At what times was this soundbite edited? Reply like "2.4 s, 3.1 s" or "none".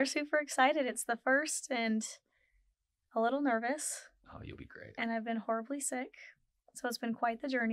none